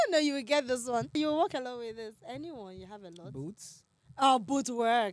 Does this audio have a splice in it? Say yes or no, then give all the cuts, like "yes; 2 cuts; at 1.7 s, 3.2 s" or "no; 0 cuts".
yes; 1 cut; at 1.1 s